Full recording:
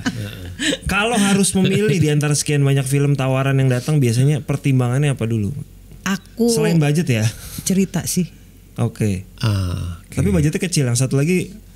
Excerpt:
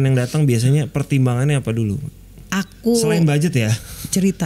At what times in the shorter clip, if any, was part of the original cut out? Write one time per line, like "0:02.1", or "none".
none